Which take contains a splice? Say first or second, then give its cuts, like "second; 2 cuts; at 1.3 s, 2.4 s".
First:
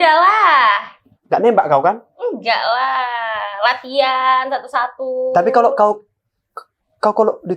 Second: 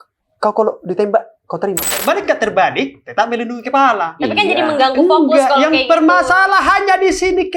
second; 1 cut; at 2.0 s